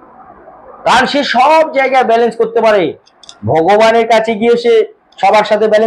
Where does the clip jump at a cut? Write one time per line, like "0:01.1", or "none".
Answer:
none